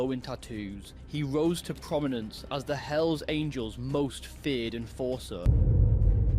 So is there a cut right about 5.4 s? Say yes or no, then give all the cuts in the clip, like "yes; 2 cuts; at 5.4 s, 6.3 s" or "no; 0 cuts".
yes; 1 cut; at 5.4 s